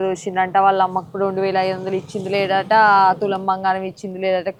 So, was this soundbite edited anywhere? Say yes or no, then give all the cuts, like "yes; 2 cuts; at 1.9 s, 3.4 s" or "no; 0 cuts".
no; 0 cuts